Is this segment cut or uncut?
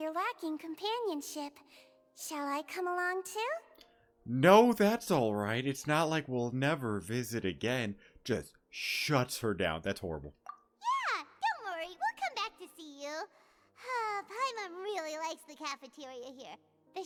uncut